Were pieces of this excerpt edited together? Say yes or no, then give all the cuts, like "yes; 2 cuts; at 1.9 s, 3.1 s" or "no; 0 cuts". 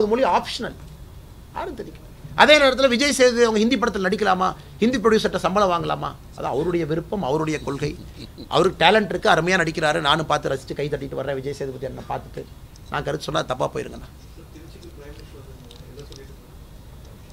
no; 0 cuts